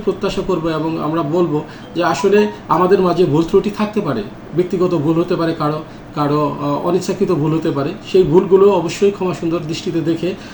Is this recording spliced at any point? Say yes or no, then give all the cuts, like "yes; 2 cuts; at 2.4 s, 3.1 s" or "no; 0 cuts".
no; 0 cuts